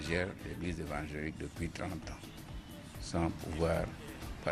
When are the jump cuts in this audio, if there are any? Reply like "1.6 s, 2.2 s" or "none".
2.8 s